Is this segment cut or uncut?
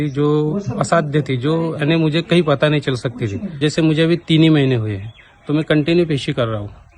uncut